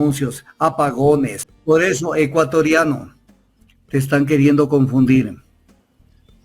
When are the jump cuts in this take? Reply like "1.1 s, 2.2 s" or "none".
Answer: 1.5 s